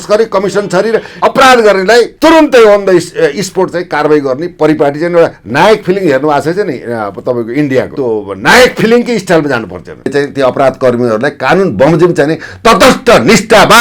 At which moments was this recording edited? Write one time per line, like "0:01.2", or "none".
0:01.1
0:02.1
0:07.9
0:10.1

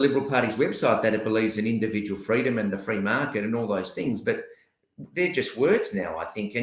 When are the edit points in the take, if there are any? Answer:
none

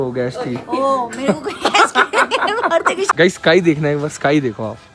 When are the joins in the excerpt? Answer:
0:03.1

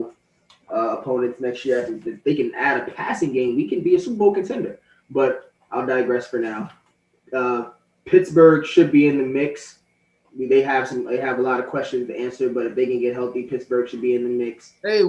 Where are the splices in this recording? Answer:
none

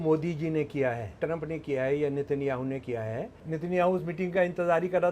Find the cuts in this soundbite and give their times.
0:01.2
0:03.4

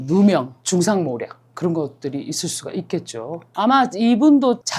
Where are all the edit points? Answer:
0:03.4

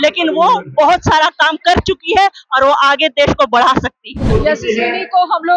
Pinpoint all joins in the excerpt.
0:04.3

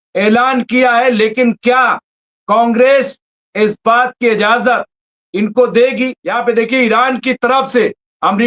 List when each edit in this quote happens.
0:06.2

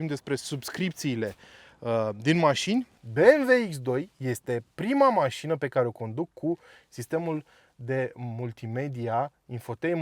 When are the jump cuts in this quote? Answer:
0:03.0

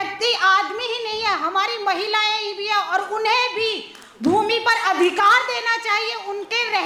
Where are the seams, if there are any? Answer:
none

